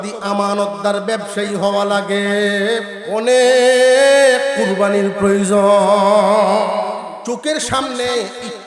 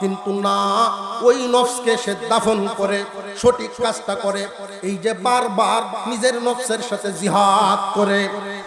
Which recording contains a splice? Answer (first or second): first